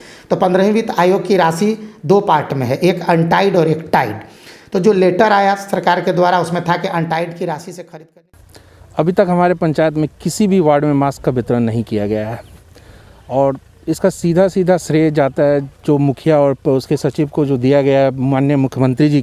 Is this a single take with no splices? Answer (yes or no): no